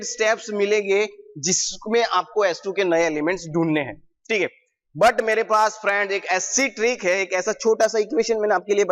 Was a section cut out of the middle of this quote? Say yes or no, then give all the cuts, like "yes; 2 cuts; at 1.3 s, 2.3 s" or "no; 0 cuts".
no; 0 cuts